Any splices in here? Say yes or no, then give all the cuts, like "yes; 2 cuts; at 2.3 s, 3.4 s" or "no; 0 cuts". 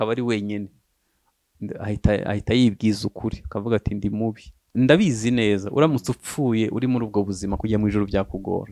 yes; 1 cut; at 4.6 s